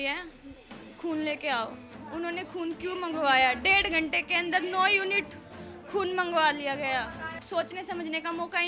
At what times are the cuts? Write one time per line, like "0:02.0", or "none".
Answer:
0:02.0
0:07.3